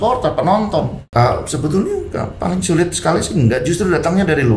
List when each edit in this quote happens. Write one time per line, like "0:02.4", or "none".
0:01.0